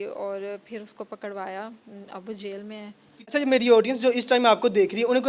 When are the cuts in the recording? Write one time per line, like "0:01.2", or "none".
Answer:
0:03.1